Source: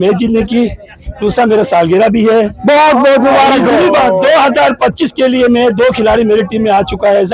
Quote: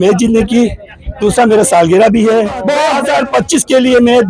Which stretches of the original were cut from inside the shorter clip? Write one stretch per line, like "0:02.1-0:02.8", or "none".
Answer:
0:02.8-0:04.3